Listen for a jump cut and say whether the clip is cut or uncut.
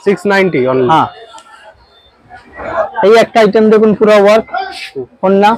cut